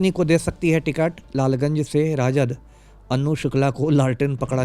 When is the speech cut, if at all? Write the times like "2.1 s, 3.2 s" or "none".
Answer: 1.2 s

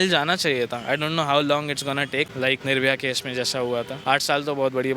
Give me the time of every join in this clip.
2.4 s, 3.9 s

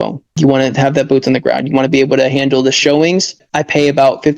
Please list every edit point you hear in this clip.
3.5 s

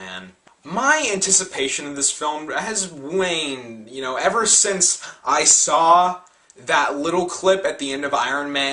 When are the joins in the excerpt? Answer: 4.7 s

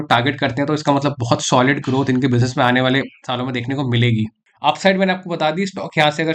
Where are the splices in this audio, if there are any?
4.4 s

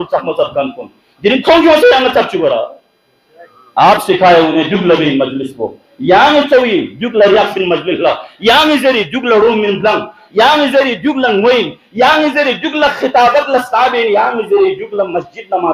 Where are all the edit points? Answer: none

